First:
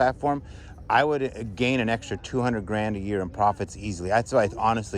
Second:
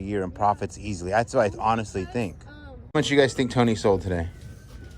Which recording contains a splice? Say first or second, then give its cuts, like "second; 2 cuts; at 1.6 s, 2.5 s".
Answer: second; 1 cut; at 2.9 s